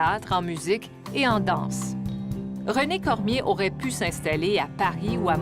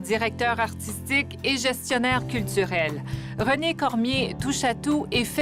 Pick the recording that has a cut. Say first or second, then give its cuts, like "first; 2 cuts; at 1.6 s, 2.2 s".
first; 1 cut; at 1.3 s